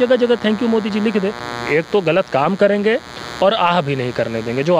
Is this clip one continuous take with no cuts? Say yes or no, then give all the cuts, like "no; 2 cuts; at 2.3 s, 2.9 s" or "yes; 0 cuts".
no; 1 cut; at 1.6 s